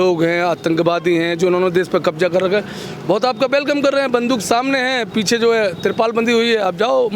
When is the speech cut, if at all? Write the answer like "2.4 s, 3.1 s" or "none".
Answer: none